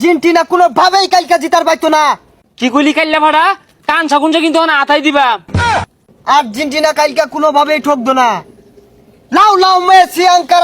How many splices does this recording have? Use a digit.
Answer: 2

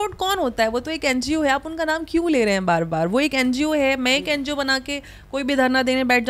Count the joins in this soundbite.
0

